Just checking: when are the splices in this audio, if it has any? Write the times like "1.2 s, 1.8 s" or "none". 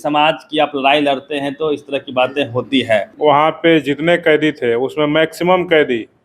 3.1 s